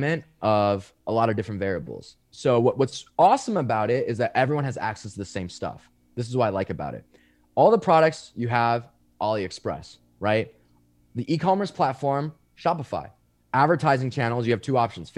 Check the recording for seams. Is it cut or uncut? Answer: uncut